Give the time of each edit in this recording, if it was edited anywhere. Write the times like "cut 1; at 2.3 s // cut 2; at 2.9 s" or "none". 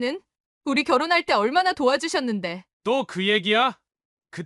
none